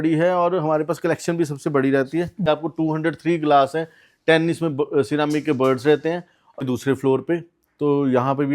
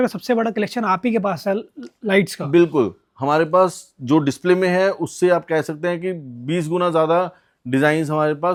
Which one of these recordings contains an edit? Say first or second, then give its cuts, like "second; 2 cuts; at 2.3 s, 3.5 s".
first; 2 cuts; at 2.5 s, 6.6 s